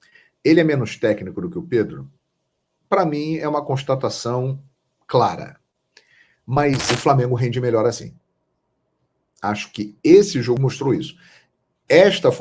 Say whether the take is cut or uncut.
cut